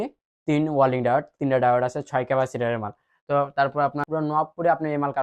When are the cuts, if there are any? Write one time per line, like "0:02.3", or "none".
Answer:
0:04.0